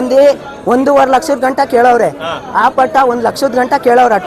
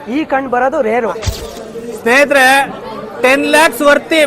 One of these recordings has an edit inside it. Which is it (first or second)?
second